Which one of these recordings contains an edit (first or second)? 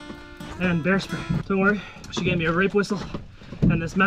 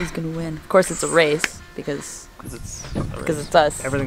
first